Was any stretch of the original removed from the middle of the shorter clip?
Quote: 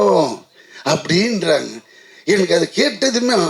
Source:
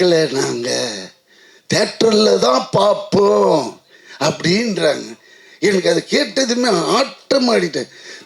no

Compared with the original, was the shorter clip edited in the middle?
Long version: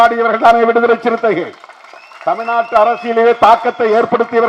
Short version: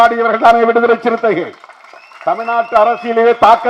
no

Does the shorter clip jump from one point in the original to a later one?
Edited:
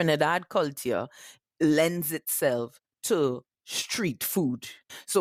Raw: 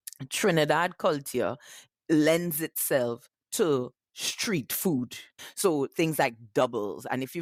no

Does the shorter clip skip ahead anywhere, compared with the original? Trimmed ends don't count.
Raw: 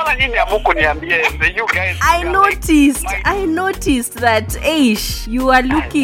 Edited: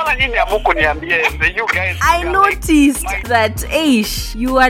yes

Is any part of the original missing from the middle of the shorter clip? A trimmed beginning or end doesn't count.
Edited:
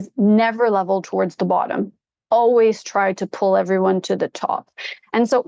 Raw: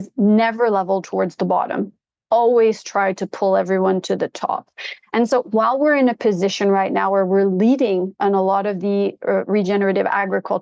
no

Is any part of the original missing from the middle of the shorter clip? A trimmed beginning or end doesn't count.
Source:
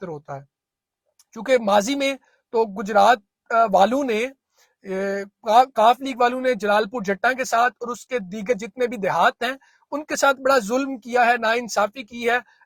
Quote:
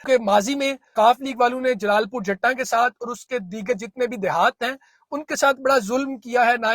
yes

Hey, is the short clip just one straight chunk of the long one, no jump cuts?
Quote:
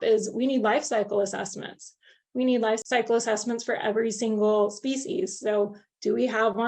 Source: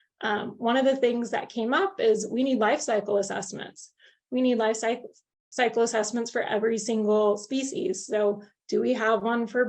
no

